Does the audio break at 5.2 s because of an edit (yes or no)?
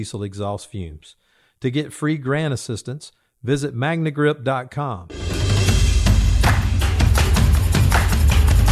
yes